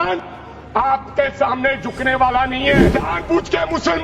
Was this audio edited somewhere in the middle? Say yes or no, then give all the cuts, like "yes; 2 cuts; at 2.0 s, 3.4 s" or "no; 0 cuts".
yes; 1 cut; at 2.9 s